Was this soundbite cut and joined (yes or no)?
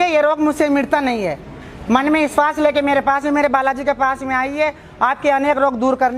no